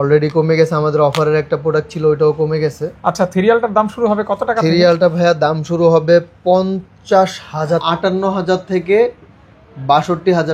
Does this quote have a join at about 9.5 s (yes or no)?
no